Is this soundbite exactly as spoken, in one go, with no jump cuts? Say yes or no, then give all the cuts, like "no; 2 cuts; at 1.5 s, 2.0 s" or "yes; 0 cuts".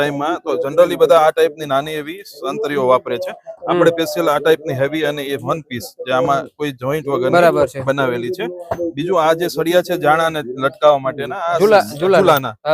yes; 0 cuts